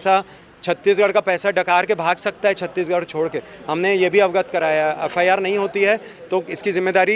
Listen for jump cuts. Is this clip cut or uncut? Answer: uncut